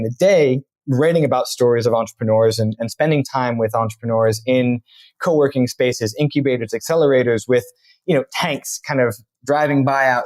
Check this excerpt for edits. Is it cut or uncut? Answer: uncut